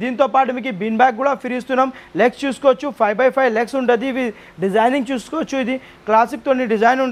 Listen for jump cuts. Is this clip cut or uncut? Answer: uncut